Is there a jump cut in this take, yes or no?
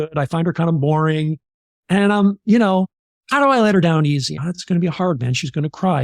yes